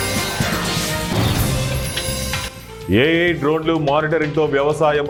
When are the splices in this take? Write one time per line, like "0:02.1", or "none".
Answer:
none